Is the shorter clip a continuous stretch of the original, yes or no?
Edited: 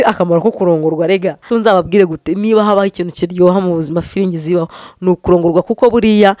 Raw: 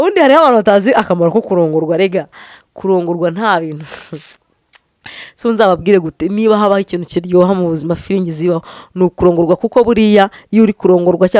no